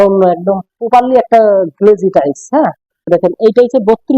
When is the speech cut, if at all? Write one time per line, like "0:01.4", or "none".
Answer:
0:03.2